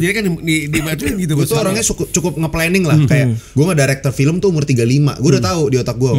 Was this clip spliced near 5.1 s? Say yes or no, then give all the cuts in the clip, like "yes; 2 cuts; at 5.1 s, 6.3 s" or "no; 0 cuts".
no; 2 cuts; at 1.4 s, 3.4 s